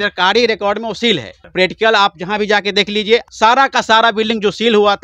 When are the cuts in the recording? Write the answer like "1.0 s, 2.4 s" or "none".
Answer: 1.4 s, 3.3 s